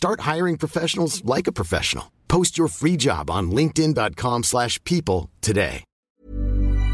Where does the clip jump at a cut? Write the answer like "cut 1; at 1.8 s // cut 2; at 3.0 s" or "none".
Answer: cut 1; at 6.0 s

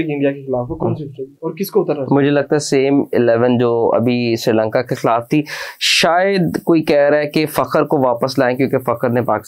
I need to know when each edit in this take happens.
none

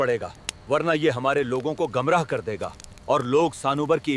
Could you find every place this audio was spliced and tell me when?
none

